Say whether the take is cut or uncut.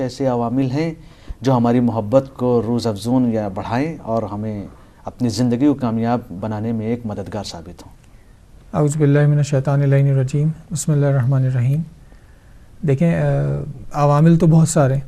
uncut